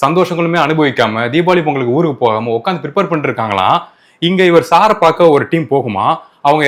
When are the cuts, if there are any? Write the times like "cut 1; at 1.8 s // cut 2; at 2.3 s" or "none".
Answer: none